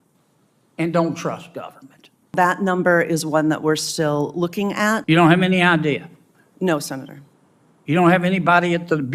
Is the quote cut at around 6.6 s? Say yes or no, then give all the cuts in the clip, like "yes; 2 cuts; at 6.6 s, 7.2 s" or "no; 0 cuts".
no; 2 cuts; at 2.3 s, 5.0 s